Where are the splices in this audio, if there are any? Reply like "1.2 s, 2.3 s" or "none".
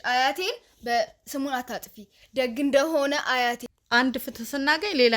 3.7 s